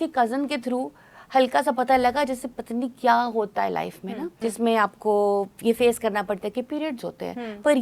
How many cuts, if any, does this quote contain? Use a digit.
1